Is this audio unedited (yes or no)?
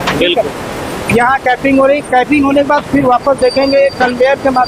yes